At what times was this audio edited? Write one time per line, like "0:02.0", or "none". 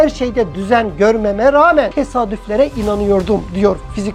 0:01.9